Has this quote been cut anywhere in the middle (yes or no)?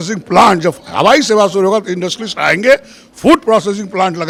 no